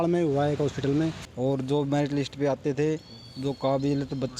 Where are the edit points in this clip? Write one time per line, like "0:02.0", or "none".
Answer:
0:01.2